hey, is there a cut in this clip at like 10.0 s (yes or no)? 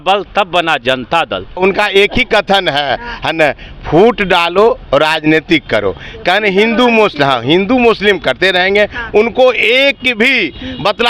no